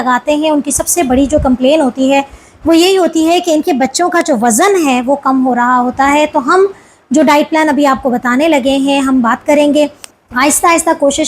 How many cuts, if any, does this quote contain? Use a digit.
1